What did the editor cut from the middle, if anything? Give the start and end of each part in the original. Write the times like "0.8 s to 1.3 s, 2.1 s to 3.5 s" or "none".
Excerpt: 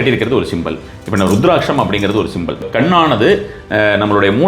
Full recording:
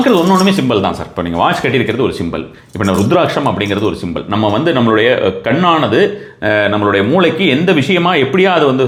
4.3 s to 5.4 s

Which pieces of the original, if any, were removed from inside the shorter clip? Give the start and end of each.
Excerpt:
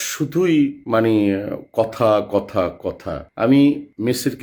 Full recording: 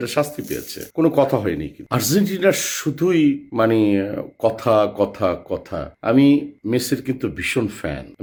none

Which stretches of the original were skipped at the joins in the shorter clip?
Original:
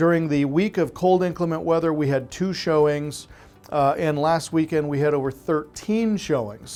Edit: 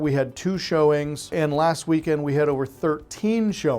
3.3 s to 4.0 s

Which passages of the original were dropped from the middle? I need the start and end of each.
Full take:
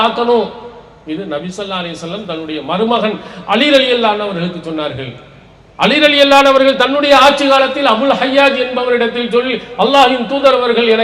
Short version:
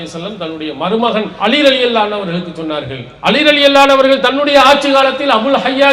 3.2 s to 3.4 s, 5.1 s to 5.6 s

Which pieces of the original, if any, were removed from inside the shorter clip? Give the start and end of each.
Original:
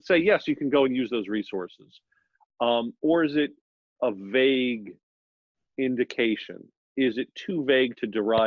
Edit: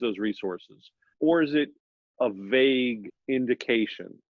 2.2 s to 2.9 s, 4.9 s to 5.6 s

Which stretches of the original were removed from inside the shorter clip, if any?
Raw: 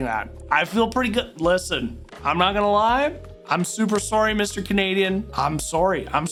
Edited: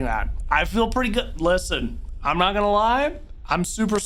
none

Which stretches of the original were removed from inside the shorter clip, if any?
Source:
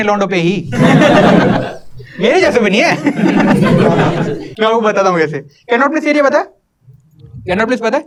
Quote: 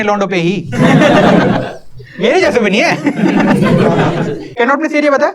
4.4 s to 5.5 s

